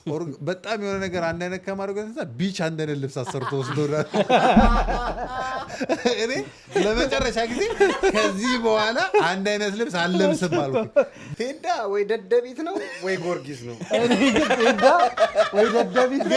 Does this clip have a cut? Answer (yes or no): yes